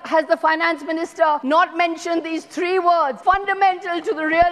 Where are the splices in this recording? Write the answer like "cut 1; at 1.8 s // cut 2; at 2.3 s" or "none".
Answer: cut 1; at 1.4 s // cut 2; at 3.2 s